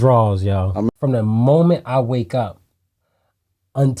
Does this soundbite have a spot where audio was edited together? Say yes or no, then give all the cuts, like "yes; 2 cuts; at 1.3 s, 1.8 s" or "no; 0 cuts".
yes; 1 cut; at 0.9 s